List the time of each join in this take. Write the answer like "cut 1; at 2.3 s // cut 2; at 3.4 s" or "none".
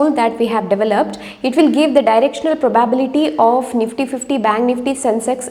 none